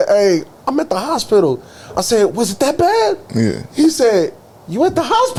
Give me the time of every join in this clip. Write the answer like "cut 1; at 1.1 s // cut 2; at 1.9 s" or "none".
none